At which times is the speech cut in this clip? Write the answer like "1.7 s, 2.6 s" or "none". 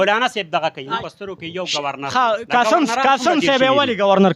1.0 s